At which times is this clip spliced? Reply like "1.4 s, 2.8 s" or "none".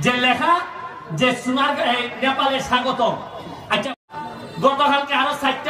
3.9 s